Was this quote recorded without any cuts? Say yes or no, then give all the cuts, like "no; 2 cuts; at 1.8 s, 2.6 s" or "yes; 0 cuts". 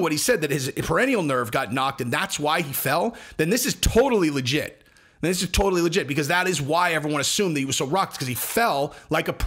yes; 0 cuts